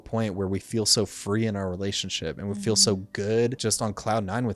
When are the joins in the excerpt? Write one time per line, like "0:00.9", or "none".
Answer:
0:03.6